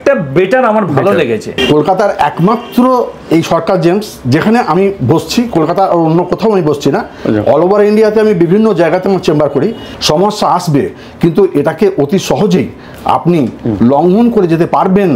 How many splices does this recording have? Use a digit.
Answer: 2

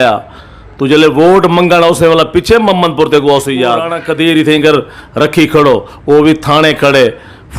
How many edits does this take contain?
1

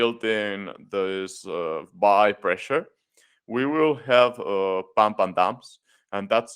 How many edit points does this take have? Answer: 0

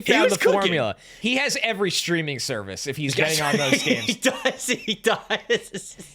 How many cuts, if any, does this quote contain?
1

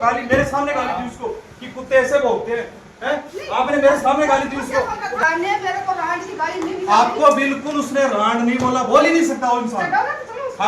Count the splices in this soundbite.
1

